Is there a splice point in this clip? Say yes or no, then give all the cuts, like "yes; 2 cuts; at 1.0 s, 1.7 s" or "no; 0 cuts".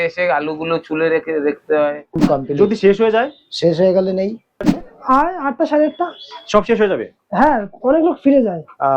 yes; 2 cuts; at 2.2 s, 4.6 s